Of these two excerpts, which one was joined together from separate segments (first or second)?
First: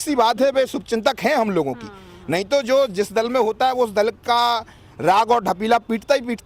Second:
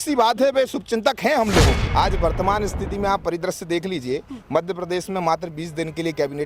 second